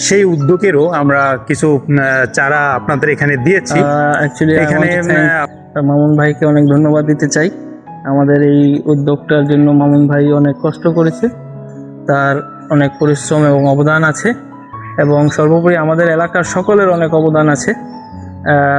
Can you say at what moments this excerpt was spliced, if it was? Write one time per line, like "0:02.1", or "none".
0:03.7